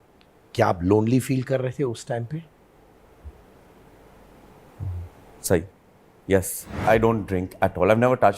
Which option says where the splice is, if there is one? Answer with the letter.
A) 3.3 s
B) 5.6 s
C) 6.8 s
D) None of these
C